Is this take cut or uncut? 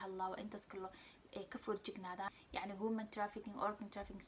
cut